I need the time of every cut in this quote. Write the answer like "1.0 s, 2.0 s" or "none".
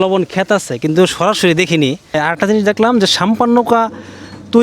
2.1 s